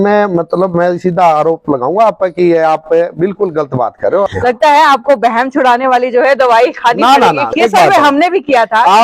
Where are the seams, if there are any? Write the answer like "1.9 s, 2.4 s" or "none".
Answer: 4.3 s, 7.5 s